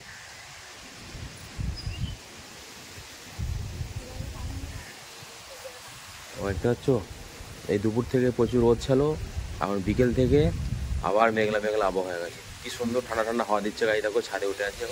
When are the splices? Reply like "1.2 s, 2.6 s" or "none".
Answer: none